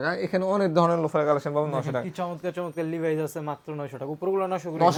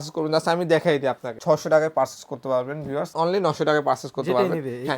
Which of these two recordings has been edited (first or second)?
second